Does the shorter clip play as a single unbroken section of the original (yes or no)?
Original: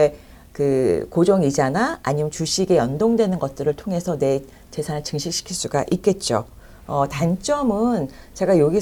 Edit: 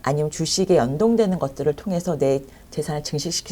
yes